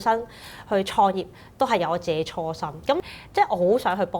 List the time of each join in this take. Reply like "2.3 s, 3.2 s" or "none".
3.0 s